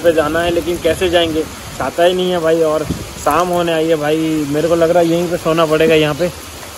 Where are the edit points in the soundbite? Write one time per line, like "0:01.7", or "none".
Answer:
none